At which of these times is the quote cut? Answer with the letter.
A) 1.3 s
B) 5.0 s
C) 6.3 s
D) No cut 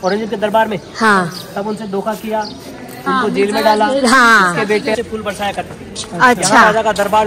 B